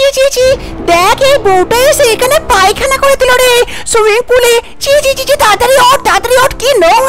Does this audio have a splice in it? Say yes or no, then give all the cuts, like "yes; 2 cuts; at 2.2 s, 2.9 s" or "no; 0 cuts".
no; 0 cuts